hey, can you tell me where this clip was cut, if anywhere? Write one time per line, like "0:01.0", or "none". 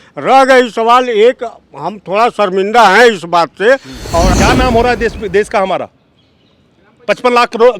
0:04.3